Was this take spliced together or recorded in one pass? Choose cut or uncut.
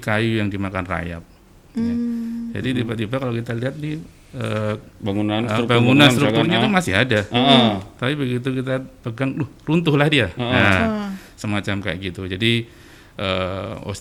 uncut